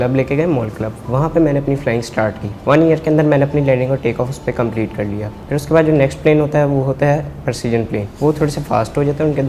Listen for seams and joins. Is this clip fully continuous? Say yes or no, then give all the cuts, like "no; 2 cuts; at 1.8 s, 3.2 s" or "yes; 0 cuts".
no; 3 cuts; at 2.5 s, 5.3 s, 8.1 s